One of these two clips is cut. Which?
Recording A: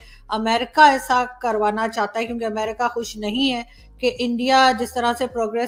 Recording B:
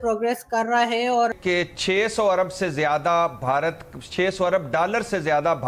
B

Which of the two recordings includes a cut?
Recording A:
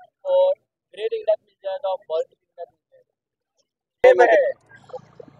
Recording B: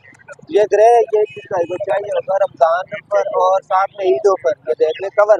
A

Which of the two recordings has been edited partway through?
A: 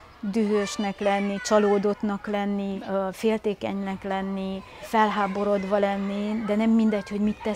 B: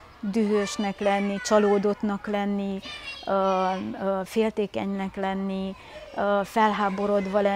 A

